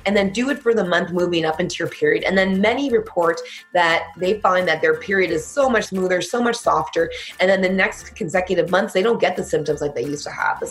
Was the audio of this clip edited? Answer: no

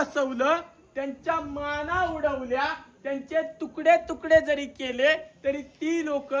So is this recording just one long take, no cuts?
yes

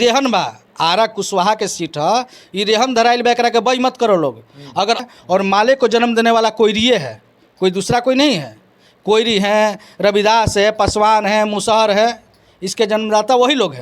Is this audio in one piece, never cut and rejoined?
no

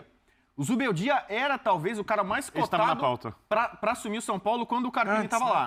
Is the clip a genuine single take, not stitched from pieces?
yes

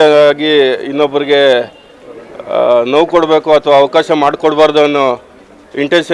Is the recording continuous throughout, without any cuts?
yes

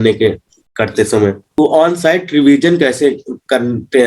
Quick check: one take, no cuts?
no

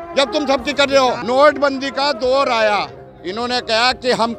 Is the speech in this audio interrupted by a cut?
yes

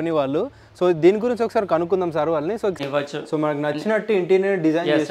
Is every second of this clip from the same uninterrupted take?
no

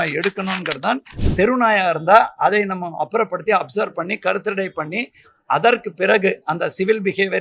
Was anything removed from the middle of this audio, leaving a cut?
yes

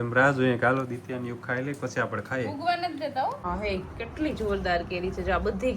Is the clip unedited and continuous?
no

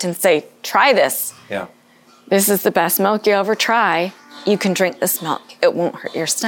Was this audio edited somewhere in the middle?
yes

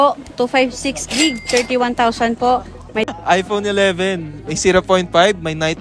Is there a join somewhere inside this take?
yes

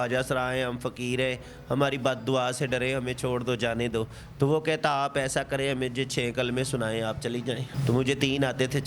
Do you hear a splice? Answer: yes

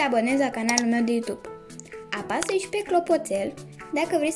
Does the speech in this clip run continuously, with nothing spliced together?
yes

